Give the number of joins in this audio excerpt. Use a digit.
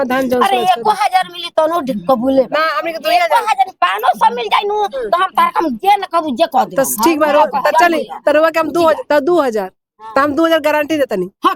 0